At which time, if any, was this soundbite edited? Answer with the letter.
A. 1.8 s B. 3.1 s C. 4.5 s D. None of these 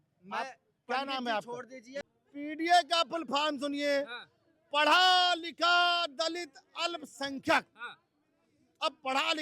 A